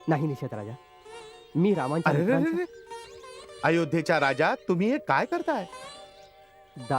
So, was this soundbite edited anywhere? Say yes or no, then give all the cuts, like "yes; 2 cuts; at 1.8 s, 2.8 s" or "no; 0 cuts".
no; 0 cuts